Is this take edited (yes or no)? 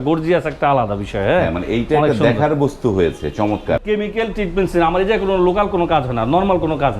yes